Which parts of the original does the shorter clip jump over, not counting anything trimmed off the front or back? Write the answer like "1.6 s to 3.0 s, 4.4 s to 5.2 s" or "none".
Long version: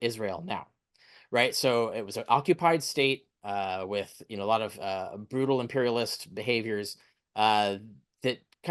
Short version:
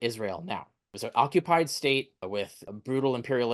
1.0 s to 2.1 s, 3.4 s to 4.8 s